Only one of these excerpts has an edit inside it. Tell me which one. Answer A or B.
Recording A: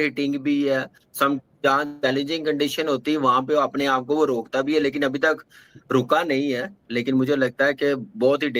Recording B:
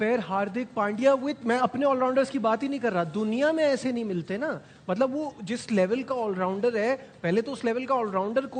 A